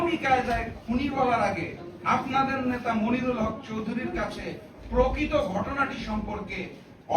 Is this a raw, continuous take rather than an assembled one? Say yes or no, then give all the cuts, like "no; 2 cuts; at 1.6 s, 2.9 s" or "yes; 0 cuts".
yes; 0 cuts